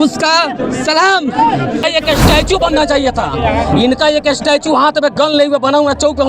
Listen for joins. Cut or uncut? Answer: cut